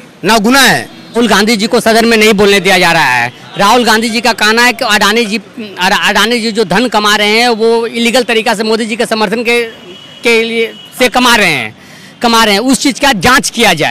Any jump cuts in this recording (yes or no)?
yes